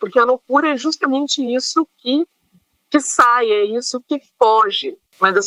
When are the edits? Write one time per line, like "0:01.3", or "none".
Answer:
none